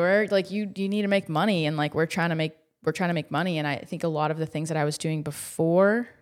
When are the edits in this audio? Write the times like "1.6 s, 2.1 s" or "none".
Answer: none